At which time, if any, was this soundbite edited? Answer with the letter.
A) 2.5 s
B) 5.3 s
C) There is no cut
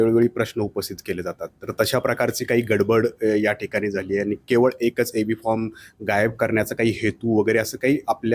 C